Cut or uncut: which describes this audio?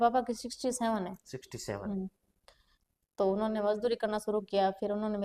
uncut